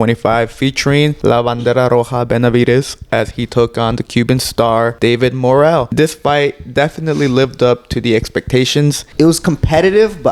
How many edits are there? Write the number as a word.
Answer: four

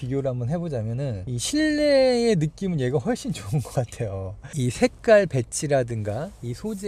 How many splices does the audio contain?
zero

